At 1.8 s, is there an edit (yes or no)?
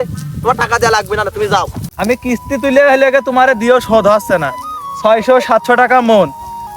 yes